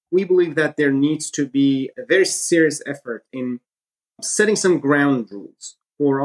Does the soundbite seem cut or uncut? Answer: uncut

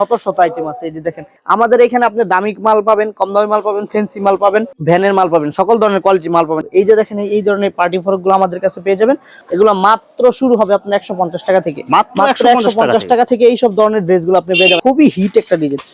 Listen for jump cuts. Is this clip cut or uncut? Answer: cut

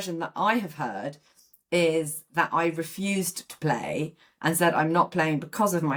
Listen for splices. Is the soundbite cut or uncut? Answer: uncut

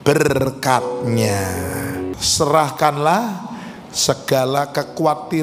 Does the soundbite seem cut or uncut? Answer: cut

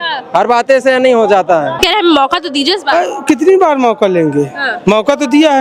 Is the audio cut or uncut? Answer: cut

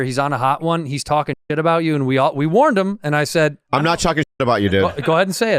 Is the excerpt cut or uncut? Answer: uncut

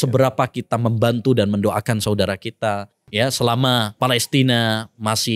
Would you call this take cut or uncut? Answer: cut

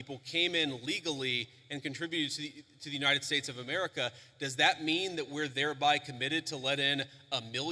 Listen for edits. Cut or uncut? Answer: uncut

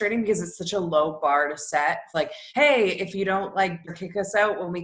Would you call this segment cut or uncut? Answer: cut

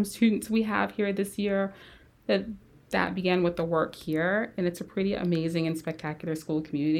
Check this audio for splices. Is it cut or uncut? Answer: uncut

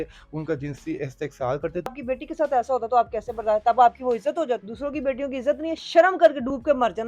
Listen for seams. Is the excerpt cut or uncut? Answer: cut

